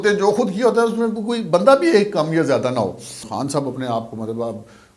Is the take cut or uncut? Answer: cut